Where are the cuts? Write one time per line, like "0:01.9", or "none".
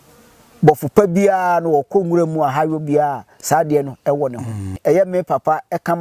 0:04.8